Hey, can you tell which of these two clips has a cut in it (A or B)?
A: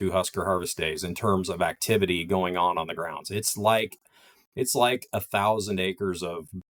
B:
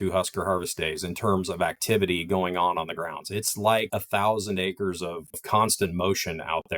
B